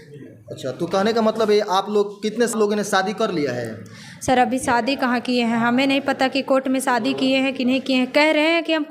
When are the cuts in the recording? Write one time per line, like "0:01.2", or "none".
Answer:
0:02.5